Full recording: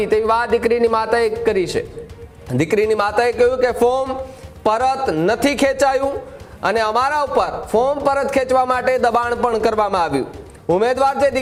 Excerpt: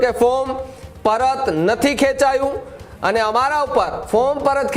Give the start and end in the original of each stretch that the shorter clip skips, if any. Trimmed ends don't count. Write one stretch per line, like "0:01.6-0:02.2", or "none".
none